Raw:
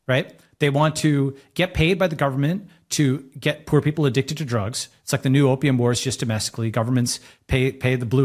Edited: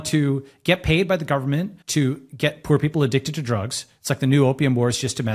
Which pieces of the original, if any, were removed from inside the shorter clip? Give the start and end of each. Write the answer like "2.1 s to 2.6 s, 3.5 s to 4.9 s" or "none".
2.7 s to 2.8 s